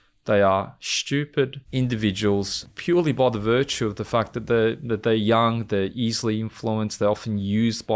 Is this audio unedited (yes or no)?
no